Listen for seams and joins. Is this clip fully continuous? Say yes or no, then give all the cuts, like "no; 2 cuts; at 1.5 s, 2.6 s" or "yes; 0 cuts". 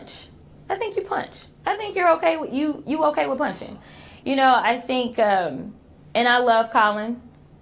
yes; 0 cuts